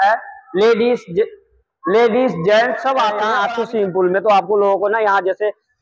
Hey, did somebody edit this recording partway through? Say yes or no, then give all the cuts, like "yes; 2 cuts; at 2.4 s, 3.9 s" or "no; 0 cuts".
yes; 1 cut; at 3.3 s